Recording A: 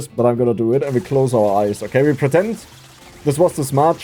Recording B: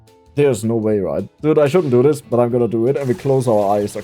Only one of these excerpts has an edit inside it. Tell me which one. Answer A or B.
B